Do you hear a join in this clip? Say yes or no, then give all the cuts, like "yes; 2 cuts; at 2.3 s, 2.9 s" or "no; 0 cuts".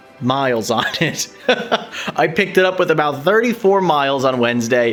no; 0 cuts